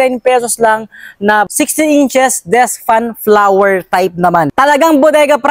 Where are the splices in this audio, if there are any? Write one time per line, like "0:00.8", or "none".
0:01.5
0:04.5

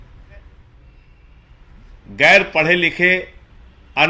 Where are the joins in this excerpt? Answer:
0:01.0

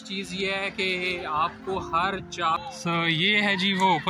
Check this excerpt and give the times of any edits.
0:02.6

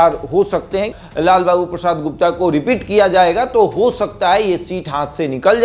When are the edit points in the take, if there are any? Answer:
0:01.0

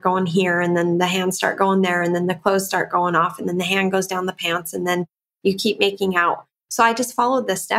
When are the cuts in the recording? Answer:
none

